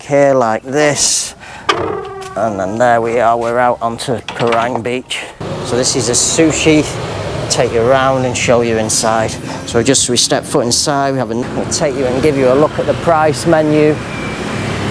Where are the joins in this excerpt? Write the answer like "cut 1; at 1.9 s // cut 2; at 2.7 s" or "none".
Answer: cut 1; at 5.5 s // cut 2; at 11.4 s